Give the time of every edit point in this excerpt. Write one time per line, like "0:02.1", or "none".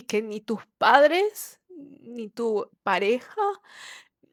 none